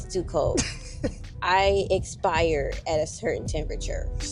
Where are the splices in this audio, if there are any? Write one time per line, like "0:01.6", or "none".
none